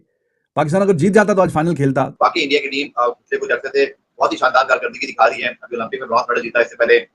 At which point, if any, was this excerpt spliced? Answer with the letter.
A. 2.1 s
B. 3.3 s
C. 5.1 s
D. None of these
A